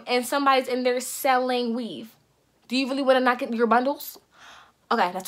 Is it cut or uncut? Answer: uncut